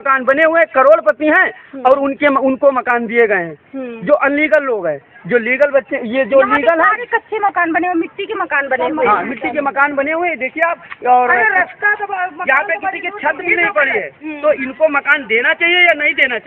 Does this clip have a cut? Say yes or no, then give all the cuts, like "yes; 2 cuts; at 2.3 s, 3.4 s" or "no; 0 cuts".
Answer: no; 0 cuts